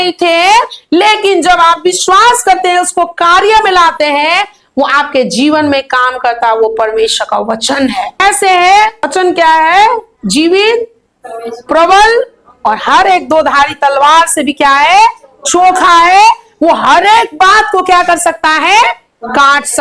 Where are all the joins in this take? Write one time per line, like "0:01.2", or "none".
0:08.2
0:09.1